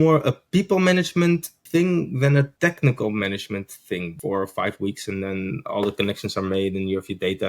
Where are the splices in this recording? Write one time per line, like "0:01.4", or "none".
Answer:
0:01.6
0:02.5
0:04.1